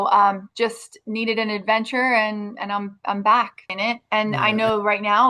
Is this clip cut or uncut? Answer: cut